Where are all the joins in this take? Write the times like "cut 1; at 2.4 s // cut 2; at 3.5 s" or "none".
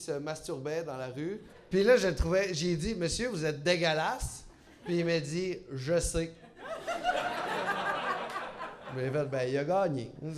cut 1; at 1.5 s